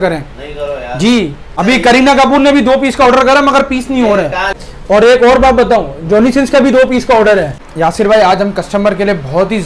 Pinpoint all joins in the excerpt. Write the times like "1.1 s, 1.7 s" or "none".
1.4 s, 4.6 s, 7.6 s

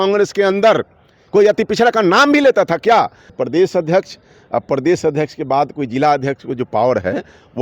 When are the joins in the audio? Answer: 3.2 s

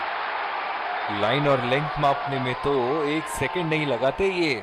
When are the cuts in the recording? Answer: none

